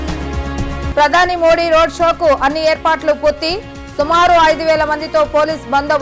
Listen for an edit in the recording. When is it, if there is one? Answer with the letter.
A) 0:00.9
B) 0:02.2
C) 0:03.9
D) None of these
A